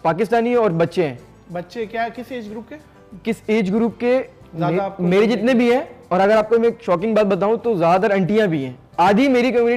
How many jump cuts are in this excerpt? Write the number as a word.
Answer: zero